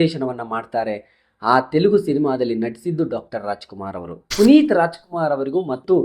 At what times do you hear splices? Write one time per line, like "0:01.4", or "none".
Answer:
0:04.2